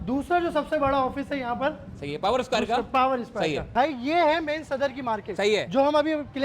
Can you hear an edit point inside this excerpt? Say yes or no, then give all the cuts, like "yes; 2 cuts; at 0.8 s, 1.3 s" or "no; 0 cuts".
yes; 1 cut; at 3.7 s